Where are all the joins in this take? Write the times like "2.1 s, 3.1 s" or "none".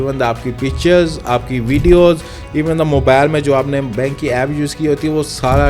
none